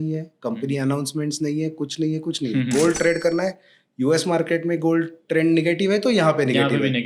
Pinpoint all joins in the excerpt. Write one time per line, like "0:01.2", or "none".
none